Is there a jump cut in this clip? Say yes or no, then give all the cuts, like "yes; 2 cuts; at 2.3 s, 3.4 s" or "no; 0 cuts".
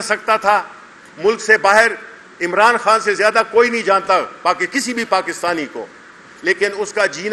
no; 0 cuts